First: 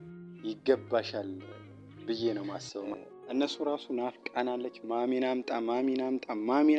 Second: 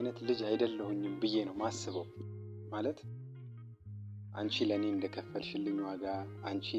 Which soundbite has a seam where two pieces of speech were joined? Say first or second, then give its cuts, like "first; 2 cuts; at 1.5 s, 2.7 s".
first; 1 cut; at 2.9 s